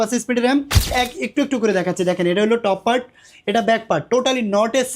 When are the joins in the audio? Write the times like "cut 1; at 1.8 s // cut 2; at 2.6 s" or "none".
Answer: cut 1; at 0.9 s